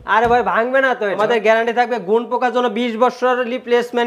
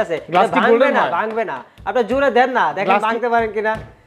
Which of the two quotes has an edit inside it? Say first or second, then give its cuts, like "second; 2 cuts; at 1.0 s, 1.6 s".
first; 1 cut; at 1.2 s